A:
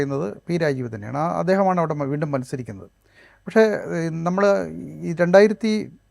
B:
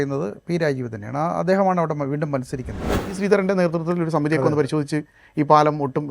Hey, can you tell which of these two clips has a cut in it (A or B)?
B